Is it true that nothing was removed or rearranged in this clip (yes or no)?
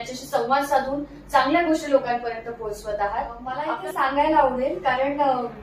no